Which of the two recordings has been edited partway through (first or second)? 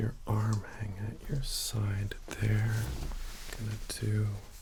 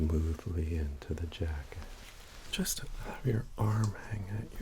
second